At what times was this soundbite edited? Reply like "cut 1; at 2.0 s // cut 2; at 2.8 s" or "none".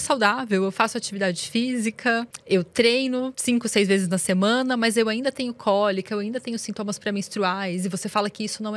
cut 1; at 2.3 s // cut 2; at 3.3 s